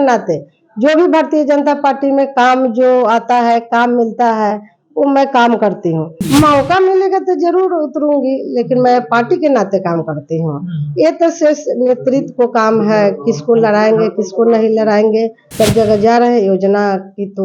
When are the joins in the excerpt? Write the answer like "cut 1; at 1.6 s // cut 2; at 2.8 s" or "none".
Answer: cut 1; at 6.2 s // cut 2; at 15.4 s